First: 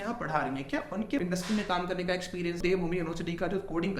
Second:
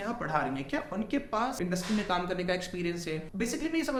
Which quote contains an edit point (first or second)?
first